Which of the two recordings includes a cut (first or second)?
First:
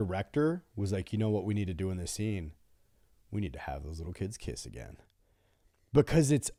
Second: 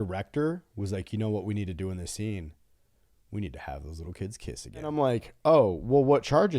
second